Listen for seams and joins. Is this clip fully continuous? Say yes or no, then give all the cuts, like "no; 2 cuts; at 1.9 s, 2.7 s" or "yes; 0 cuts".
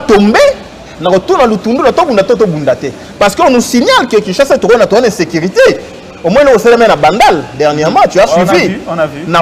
yes; 0 cuts